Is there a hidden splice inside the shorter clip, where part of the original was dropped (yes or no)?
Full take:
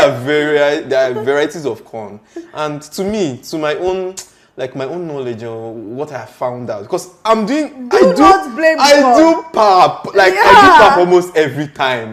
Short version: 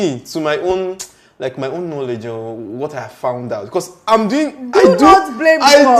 no